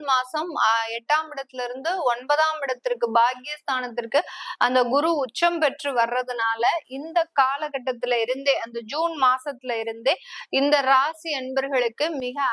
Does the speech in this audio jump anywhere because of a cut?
no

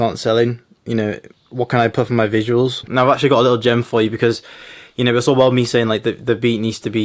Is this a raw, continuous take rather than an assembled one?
no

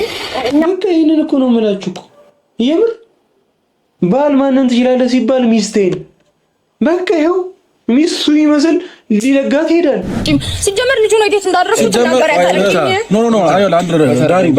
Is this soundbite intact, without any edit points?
no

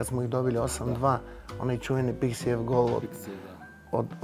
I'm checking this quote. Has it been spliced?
no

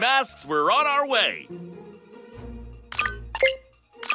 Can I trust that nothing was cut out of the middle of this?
yes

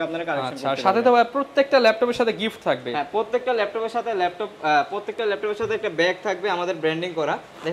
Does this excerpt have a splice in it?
no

